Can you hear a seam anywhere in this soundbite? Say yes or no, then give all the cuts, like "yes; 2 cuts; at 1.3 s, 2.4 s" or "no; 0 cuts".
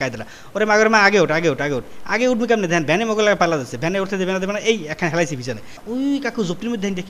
yes; 1 cut; at 5.7 s